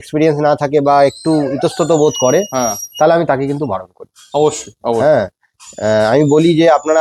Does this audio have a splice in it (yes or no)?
no